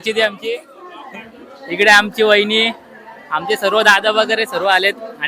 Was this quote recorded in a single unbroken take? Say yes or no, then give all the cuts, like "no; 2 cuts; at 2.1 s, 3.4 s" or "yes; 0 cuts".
yes; 0 cuts